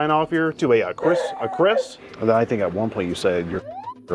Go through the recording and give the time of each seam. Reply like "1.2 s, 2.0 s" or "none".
2.0 s